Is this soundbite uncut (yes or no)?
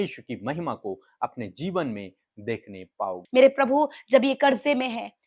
no